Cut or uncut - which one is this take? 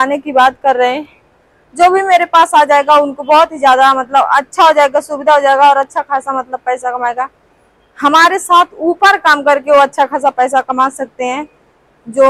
uncut